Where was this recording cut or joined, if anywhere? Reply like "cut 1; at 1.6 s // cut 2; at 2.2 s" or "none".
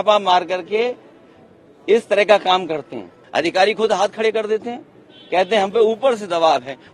cut 1; at 3.1 s

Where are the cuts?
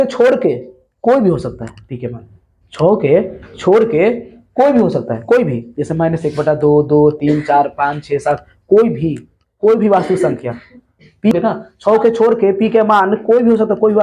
cut 1; at 11.3 s

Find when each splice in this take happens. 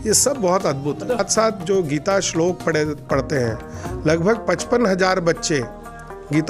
cut 1; at 1.2 s

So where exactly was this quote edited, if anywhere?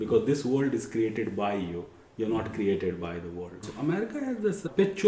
cut 1; at 3.6 s

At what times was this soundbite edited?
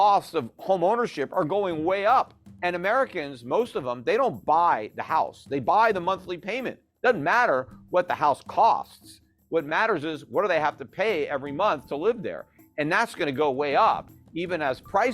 cut 1; at 2.4 s

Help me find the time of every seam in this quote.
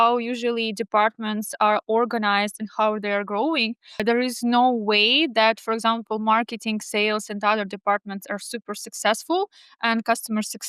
none

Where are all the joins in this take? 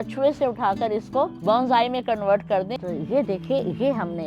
cut 1; at 1.4 s // cut 2; at 2.7 s

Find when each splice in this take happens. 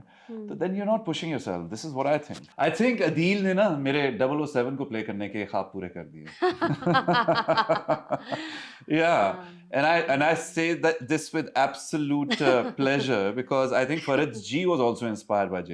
cut 1; at 2.4 s

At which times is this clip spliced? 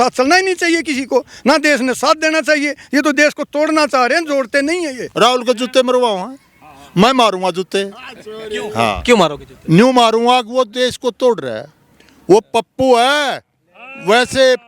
cut 1; at 5.0 s

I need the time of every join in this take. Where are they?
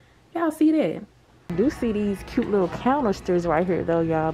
cut 1; at 1.6 s

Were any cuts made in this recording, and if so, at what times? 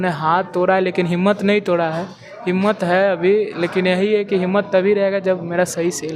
none

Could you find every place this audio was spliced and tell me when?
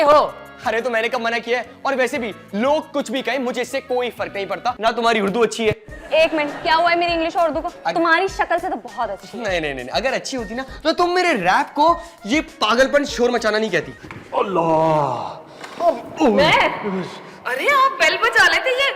cut 1; at 4.8 s // cut 2; at 13.9 s

